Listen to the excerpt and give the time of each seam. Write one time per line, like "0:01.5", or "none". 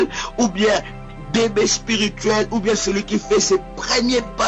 0:02.3

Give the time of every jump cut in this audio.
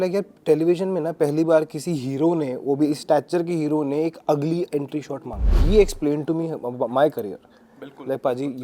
0:05.6

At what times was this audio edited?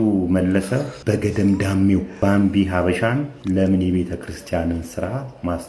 0:00.9
0:02.1
0:03.3

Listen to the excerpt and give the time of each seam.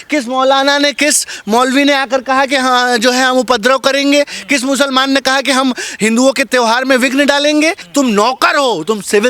0:07.8

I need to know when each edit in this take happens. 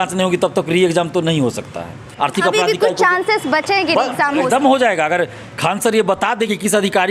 0:02.1

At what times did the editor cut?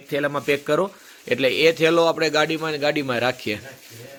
none

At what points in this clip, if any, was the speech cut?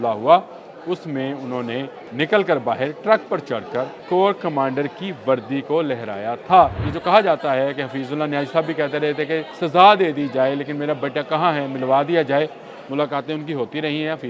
0:02.0
0:04.0
0:06.9
0:09.5

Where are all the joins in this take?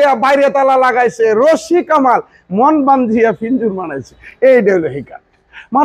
none

